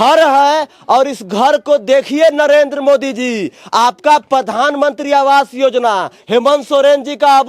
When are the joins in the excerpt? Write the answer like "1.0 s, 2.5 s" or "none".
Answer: none